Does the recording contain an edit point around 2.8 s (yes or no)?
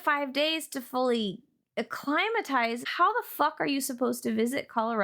yes